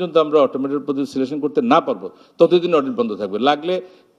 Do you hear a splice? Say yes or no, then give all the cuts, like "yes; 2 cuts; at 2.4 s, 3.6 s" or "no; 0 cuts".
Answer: no; 0 cuts